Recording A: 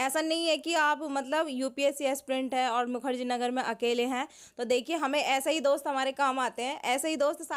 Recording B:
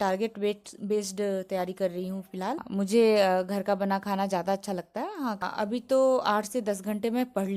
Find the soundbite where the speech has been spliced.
B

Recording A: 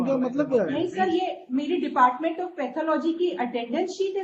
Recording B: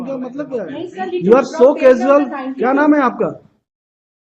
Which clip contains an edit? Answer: B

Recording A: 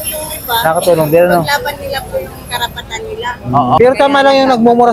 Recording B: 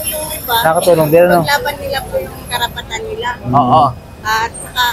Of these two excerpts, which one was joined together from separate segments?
A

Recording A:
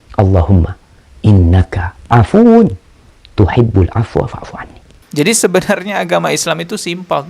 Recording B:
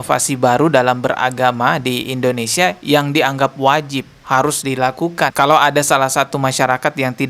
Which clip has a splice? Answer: A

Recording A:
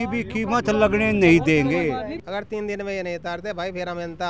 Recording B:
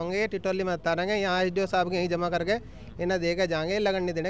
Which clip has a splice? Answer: A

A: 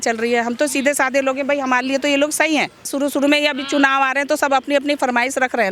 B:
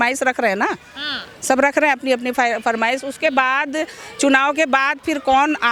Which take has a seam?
A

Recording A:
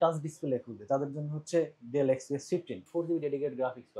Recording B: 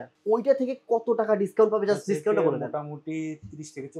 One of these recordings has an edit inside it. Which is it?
A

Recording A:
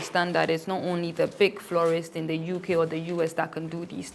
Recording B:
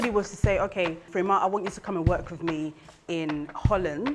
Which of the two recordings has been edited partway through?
B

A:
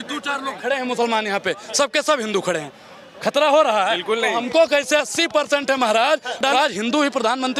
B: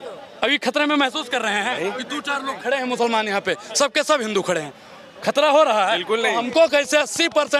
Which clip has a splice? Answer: A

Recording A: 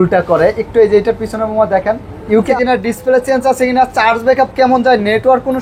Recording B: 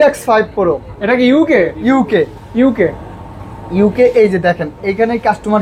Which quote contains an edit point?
A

